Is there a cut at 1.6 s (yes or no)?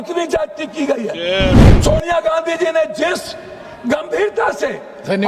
yes